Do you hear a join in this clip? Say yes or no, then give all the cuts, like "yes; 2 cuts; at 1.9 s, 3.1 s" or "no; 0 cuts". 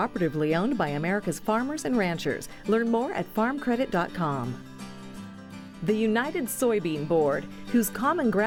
no; 0 cuts